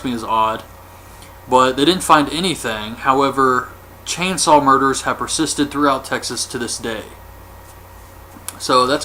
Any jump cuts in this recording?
no; 0 cuts

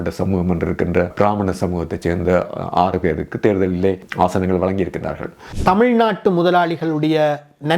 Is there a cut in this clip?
yes; 3 cuts; at 1.1 s, 4.1 s, 5.4 s

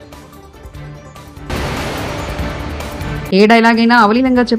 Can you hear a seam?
yes; 2 cuts; at 1.3 s, 3.0 s

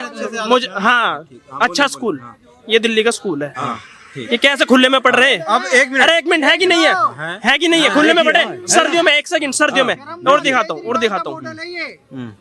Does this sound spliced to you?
no; 0 cuts

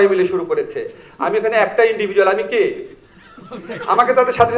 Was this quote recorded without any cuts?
yes; 0 cuts

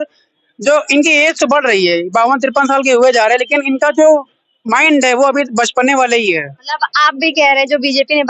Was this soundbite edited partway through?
no; 0 cuts

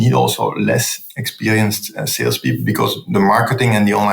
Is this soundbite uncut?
no; 1 cut; at 1.0 s

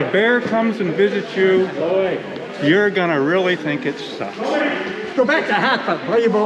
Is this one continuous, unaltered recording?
yes; 0 cuts

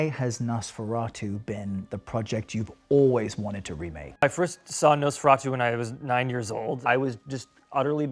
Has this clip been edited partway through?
yes; 2 cuts; at 4.2 s, 6.8 s

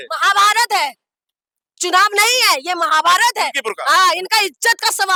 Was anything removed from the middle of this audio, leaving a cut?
no; 0 cuts

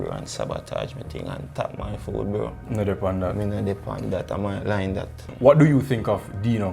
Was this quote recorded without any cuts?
no; 1 cut; at 5.2 s

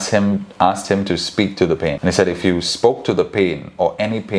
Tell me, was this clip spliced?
yes; 1 cut; at 2.0 s

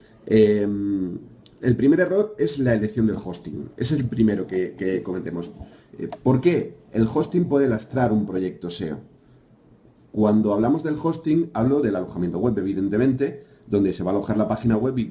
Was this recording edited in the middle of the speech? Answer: yes; 1 cut; at 13.0 s

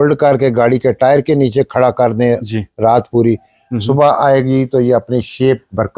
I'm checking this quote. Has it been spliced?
no; 0 cuts

